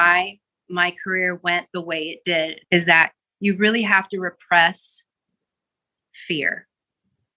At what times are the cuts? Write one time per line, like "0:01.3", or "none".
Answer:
0:02.6